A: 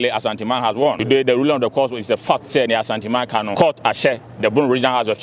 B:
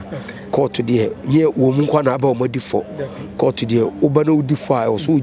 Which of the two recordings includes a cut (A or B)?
A